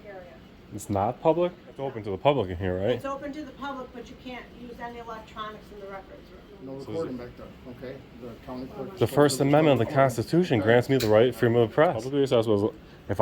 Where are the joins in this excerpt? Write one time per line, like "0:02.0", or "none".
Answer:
0:02.0
0:06.5
0:12.1